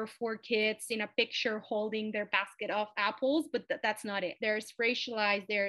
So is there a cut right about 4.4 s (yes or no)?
yes